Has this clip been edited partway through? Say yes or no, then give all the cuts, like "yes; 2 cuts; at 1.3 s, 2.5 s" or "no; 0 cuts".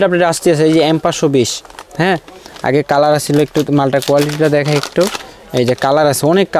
no; 0 cuts